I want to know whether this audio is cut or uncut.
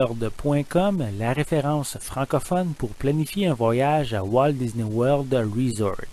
uncut